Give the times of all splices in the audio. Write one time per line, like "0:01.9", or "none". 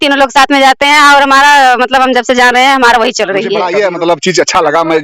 0:03.6